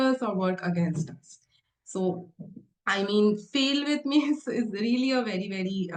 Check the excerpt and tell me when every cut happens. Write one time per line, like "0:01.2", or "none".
none